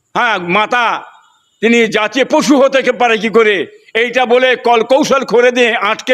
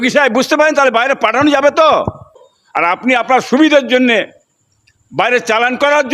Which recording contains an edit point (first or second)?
second